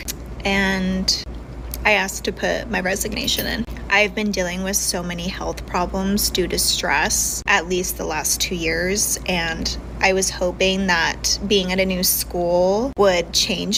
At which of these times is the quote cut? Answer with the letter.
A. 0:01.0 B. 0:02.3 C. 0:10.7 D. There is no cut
D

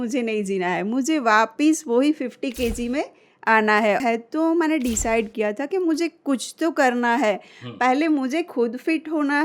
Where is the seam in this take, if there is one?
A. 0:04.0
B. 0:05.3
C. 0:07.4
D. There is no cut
A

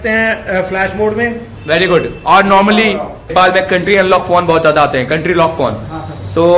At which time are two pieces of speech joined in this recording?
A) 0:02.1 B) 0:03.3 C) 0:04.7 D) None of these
B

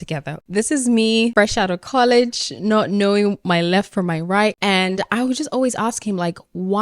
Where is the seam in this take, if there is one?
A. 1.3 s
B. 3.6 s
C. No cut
A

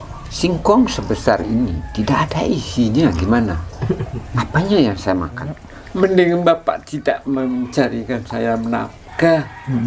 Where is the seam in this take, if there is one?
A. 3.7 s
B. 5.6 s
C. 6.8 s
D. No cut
B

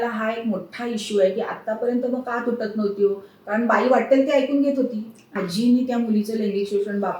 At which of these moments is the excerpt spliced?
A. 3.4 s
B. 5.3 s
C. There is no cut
B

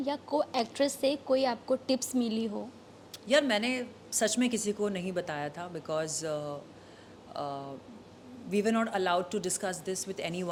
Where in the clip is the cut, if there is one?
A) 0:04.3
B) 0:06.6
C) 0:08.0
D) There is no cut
D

